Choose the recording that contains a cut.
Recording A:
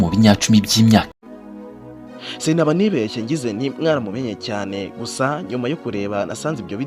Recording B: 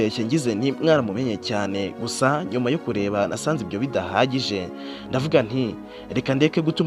A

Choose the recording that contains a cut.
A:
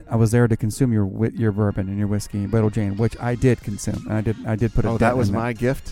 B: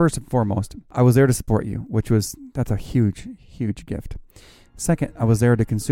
B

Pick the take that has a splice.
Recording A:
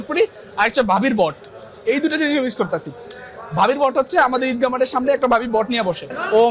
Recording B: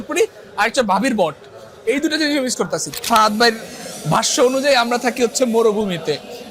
B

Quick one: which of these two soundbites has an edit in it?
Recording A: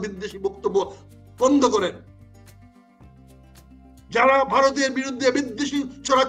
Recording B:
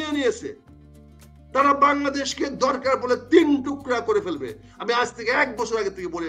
A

